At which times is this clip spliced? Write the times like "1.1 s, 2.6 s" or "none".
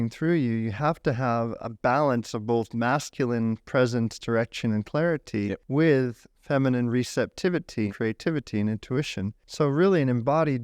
1.6 s, 5.6 s, 7.9 s, 9.4 s